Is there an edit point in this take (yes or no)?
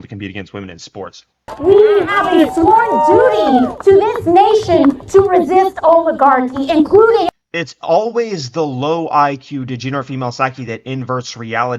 yes